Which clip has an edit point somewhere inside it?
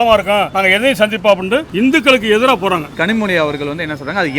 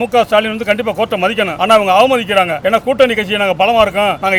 first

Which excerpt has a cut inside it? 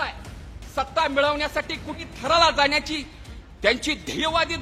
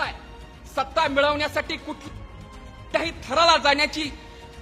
first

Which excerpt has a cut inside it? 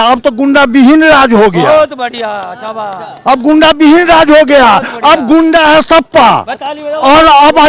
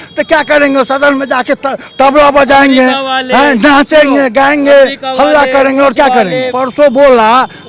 second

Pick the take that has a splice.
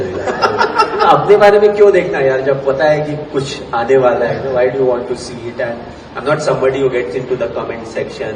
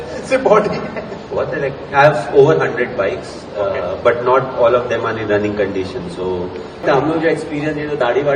second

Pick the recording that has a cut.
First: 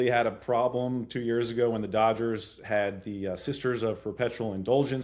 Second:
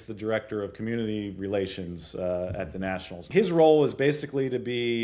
second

